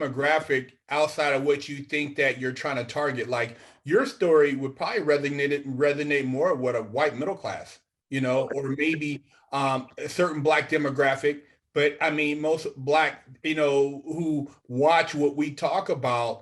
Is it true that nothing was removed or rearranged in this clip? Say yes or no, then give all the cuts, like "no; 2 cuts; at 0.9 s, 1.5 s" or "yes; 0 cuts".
yes; 0 cuts